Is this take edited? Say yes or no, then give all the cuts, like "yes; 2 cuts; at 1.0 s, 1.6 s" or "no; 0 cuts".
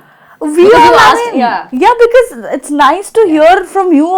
no; 0 cuts